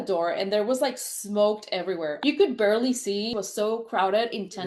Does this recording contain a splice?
no; 0 cuts

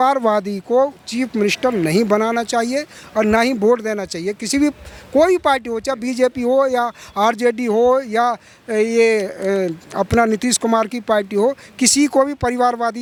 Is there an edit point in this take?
no; 0 cuts

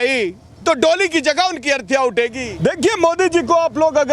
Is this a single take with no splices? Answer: no; 1 cut; at 2.5 s

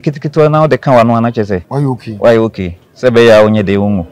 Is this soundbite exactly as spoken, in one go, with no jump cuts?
no; 1 cut; at 1.7 s

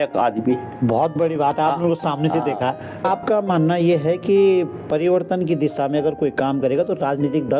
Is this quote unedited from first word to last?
no; 1 cut; at 3.0 s

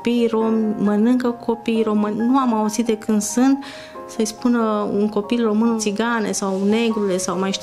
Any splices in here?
yes; 2 cuts; at 2.2 s, 5.8 s

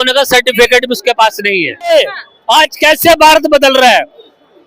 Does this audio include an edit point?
yes; 1 cut; at 1.9 s

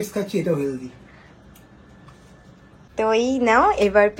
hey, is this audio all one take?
yes; 0 cuts

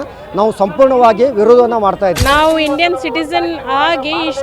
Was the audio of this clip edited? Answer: yes; 1 cut; at 2.2 s

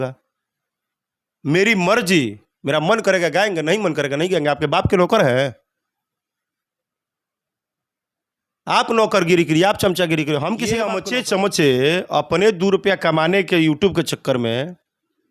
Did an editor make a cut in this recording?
yes; 1 cut; at 10.8 s

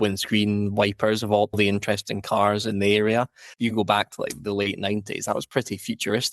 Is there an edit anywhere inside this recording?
yes; 1 cut; at 3.4 s

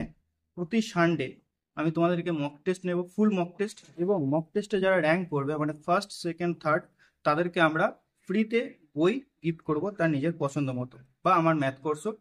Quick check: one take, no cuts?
yes; 0 cuts

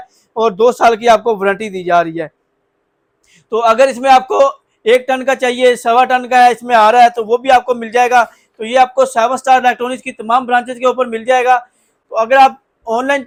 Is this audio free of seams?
yes; 0 cuts

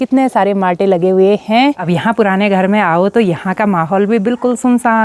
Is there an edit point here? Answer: yes; 1 cut; at 1.8 s

